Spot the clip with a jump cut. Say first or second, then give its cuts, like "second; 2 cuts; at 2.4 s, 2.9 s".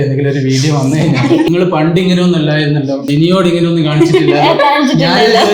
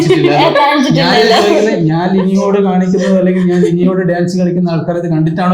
first; 2 cuts; at 1.5 s, 3.1 s